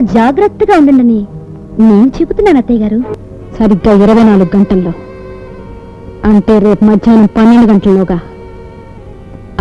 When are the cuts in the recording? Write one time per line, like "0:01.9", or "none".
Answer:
0:03.2